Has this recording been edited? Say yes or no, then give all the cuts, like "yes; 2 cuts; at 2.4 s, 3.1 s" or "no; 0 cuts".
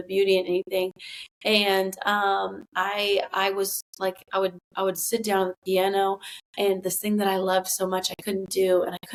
no; 0 cuts